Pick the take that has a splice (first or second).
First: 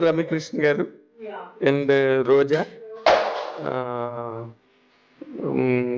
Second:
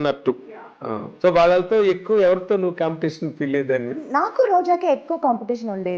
second